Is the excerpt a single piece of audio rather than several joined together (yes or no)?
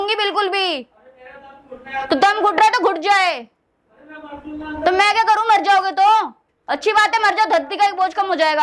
yes